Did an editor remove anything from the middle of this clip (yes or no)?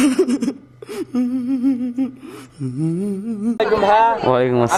no